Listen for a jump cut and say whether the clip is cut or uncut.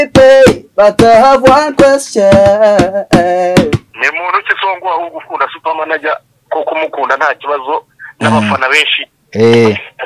cut